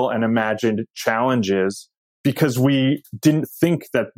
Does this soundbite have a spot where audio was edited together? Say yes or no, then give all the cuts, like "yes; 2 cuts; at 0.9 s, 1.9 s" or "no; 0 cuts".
yes; 1 cut; at 2.1 s